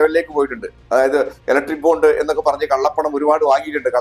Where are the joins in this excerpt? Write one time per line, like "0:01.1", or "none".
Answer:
none